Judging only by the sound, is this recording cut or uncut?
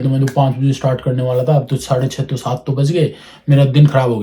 uncut